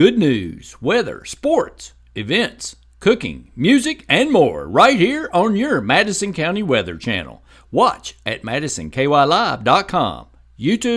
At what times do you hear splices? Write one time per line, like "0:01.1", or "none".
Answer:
none